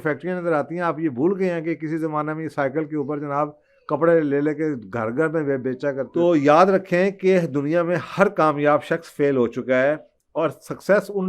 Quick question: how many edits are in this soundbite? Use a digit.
1